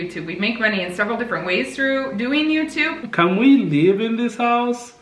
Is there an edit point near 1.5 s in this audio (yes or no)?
no